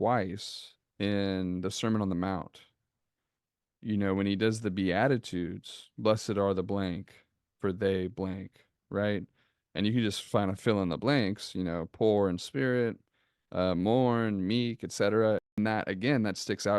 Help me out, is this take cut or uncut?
cut